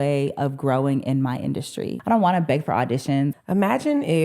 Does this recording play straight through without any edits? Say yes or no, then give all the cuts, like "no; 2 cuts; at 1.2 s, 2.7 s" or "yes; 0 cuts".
no; 2 cuts; at 2.0 s, 3.3 s